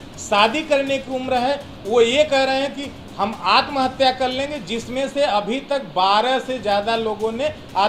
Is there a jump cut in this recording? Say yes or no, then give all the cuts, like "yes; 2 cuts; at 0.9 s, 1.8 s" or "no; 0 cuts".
no; 0 cuts